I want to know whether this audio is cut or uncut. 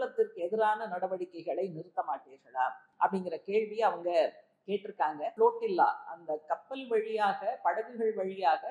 cut